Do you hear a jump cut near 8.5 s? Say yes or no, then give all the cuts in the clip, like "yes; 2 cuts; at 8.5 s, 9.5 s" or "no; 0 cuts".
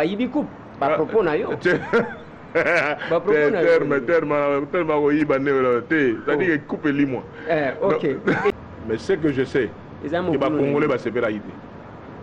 yes; 1 cut; at 8.5 s